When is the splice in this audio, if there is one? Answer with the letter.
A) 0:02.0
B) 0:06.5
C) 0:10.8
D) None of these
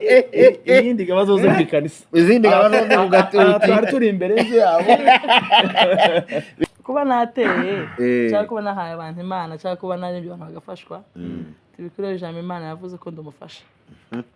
B